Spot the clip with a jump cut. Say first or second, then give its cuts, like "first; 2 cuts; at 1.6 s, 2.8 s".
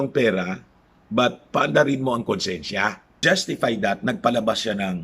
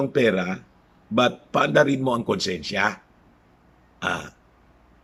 first; 1 cut; at 3.2 s